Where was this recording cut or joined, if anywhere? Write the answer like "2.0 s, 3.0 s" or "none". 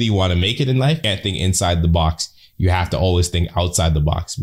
1.0 s